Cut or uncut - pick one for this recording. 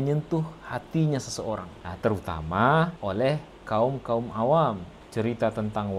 uncut